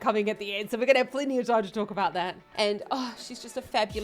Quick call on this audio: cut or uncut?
cut